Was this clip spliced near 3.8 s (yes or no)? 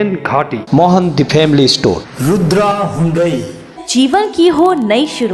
yes